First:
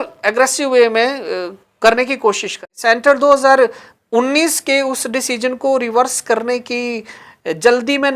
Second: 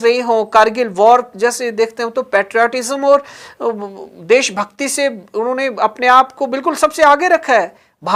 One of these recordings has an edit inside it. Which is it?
first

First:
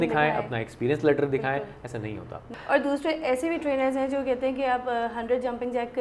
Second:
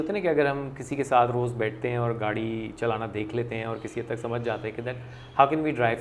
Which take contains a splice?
first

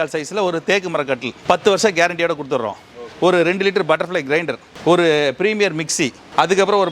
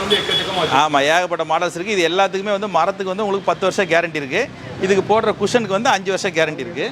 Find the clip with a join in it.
first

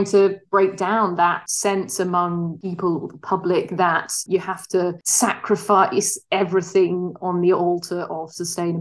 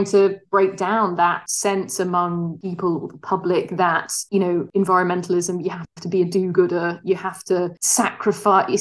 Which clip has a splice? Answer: first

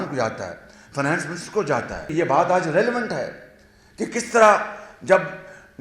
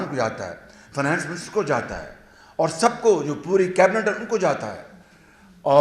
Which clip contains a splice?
first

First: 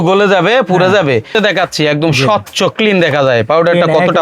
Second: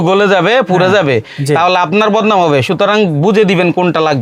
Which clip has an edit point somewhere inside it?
first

